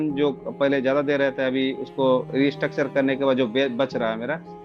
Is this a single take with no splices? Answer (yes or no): yes